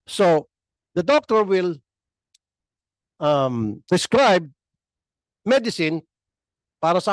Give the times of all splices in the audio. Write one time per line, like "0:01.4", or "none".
none